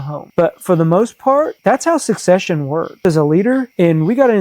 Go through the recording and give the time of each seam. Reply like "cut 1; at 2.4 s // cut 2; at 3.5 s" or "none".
cut 1; at 3.0 s